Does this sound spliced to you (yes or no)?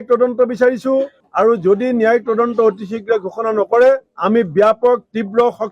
yes